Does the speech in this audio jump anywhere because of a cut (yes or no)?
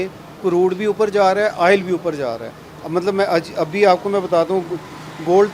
no